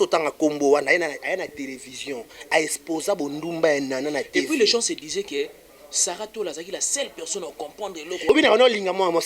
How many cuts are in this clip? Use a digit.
1